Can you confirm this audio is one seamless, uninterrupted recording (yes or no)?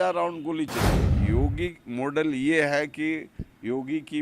no